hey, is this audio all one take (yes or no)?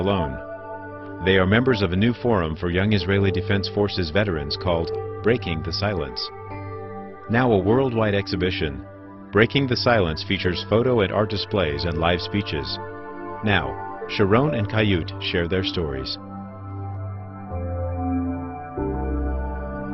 yes